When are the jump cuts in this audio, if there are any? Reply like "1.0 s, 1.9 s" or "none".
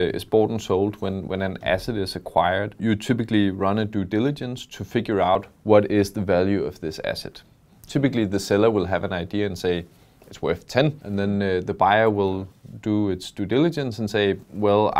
2.8 s, 5.4 s, 11.0 s